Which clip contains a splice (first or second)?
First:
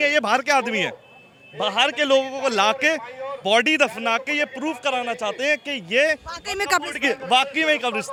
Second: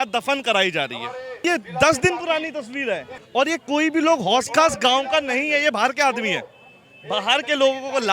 second